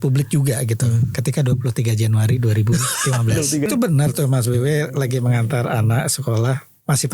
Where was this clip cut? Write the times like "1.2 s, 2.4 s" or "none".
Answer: 3.7 s